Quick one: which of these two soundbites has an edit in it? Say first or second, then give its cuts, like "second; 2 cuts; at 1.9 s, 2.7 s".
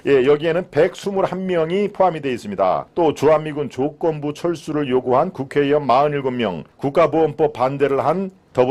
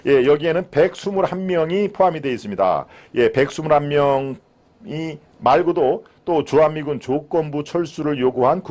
first; 2 cuts; at 2.9 s, 6.7 s